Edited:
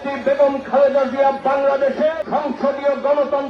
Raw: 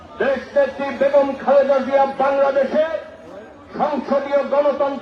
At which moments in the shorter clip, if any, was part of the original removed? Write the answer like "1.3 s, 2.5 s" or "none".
2.2 s

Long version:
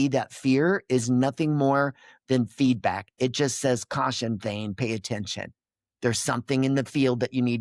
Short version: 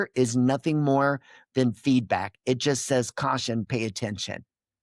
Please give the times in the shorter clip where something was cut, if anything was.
3.7 s

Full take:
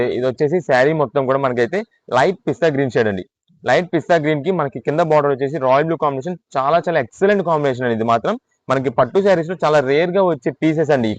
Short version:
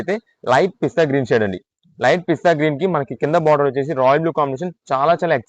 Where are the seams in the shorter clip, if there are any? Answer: none

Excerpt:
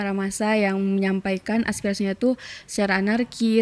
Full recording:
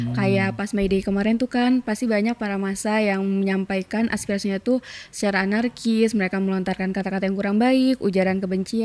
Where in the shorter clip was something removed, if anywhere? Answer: none

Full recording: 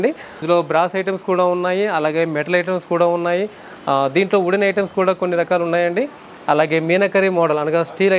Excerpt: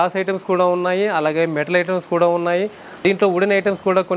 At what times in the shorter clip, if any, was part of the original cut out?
3.0 s

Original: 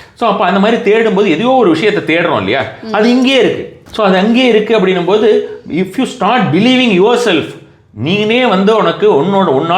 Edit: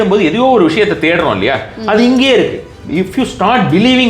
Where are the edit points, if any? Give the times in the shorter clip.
2.8 s

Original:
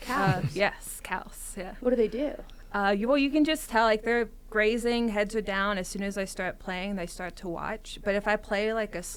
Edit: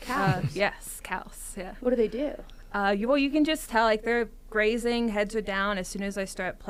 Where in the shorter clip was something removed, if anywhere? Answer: none

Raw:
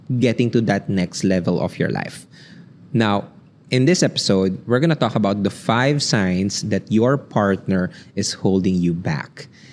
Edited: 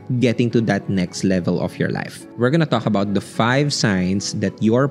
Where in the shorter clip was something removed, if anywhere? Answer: 2.3 s

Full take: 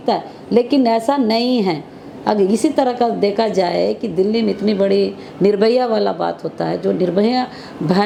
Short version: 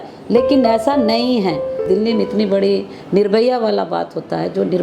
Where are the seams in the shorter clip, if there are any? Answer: 1.8 s

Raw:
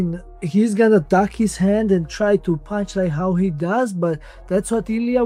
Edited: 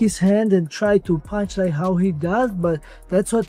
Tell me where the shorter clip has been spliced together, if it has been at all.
none

